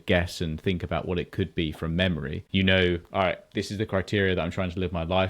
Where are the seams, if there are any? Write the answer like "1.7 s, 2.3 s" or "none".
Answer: 2.4 s

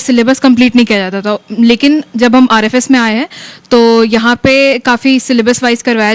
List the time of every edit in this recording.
none

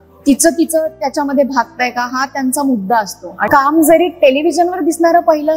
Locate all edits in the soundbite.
3.5 s

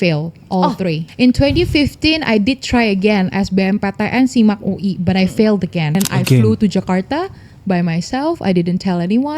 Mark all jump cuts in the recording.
1.1 s, 6.0 s

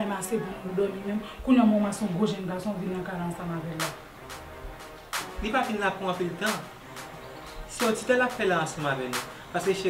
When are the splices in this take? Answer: 5.2 s

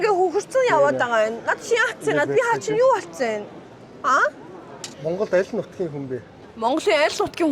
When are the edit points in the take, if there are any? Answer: 4.9 s

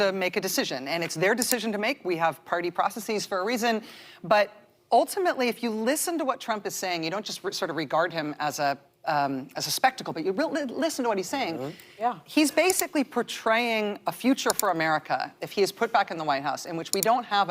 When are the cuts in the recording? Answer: none

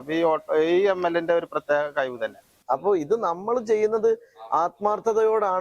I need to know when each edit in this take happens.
2.5 s

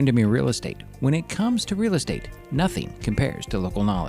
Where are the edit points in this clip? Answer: none

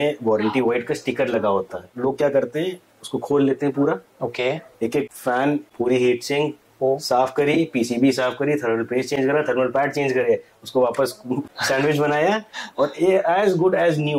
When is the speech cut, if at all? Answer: 1.9 s

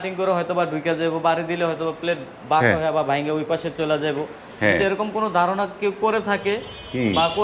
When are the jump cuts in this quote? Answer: none

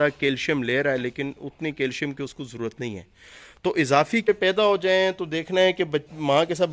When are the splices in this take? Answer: 4.3 s

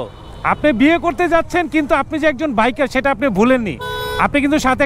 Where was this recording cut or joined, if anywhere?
none

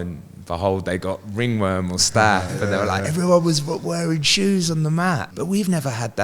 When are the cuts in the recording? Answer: 5.3 s

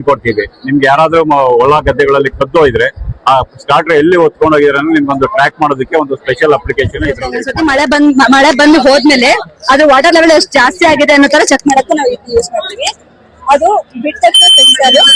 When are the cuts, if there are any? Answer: 7.4 s

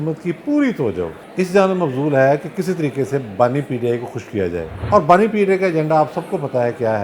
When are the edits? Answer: 1.2 s, 4.7 s

